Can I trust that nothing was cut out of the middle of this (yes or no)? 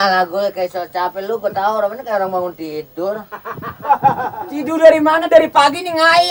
yes